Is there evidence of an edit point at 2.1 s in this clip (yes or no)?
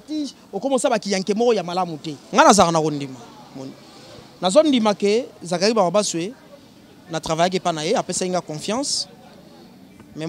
yes